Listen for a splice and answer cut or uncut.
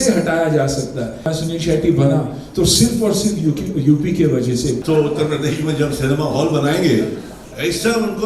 cut